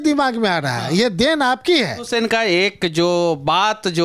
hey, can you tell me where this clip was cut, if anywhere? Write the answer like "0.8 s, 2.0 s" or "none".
2.0 s